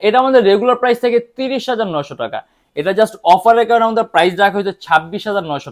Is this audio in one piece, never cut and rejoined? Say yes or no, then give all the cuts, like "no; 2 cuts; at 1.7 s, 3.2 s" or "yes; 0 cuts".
yes; 0 cuts